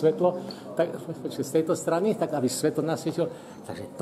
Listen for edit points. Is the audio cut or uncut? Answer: uncut